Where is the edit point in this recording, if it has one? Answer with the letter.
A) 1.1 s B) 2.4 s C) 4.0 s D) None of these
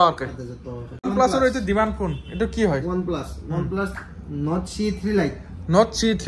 A